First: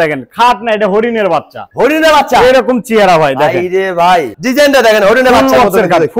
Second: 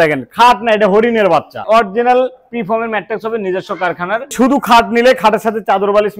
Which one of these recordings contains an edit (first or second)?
second